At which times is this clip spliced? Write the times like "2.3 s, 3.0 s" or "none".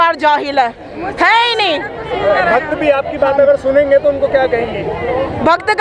none